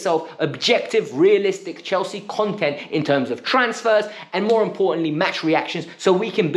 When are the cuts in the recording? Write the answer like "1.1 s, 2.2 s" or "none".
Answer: none